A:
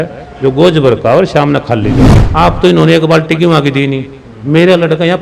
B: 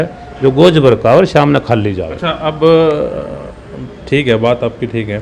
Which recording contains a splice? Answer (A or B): A